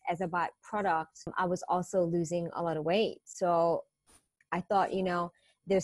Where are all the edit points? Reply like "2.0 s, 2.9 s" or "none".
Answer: 1.3 s